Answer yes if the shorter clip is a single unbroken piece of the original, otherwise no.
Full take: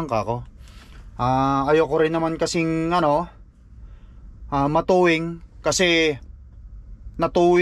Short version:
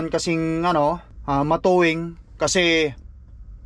no